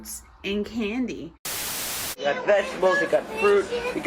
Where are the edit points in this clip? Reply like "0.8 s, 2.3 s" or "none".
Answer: 1.6 s